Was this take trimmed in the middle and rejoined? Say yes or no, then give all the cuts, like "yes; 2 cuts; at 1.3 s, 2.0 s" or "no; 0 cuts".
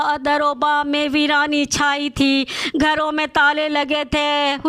no; 0 cuts